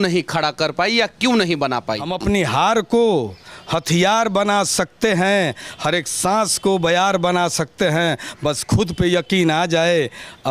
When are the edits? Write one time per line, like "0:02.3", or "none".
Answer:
0:02.1

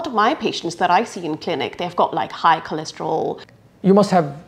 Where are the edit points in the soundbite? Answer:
0:03.5

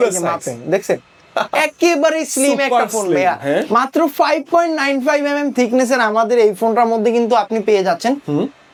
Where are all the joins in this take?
none

